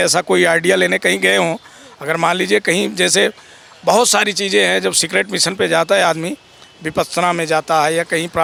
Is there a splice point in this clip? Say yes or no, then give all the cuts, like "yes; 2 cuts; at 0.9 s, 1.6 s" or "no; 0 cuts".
no; 0 cuts